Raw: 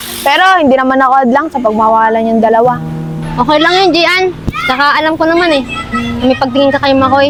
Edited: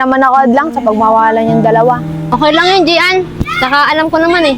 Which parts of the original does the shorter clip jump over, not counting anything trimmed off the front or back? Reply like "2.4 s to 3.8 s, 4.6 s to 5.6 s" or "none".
2.9 s to 3.2 s

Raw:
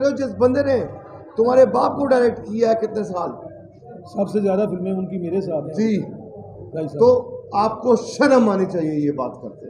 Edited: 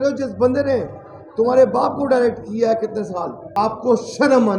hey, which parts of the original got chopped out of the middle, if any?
3.4 s to 7.4 s

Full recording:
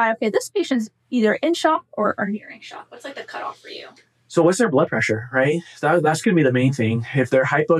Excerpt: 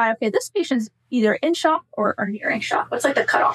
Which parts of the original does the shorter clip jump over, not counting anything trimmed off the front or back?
none

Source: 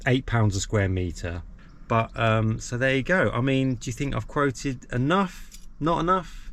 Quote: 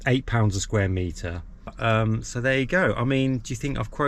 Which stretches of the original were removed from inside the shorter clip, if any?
1.8 s to 2.1 s

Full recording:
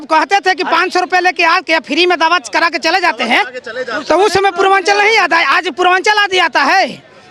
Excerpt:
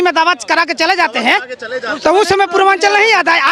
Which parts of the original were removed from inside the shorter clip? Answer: none

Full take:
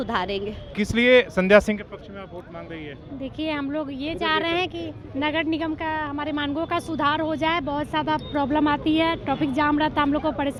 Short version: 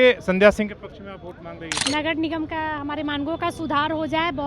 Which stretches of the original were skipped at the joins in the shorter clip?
2.8 s to 5.0 s

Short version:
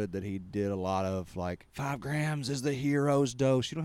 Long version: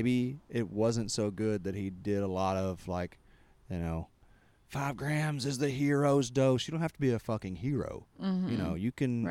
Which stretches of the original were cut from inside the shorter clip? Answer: 3.2 s to 4.6 s

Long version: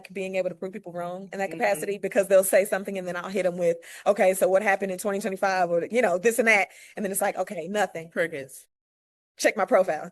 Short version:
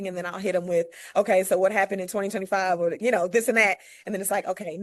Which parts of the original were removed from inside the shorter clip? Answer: none

